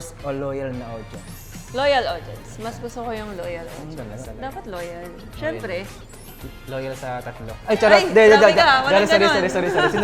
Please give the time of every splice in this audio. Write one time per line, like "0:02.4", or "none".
0:04.2